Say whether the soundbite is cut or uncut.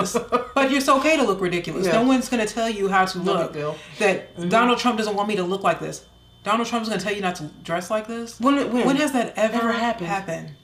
uncut